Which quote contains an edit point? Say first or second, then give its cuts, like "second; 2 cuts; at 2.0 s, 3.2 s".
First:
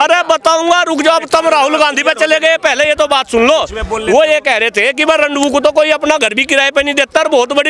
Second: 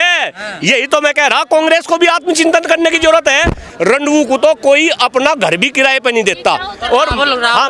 second; 1 cut; at 3.6 s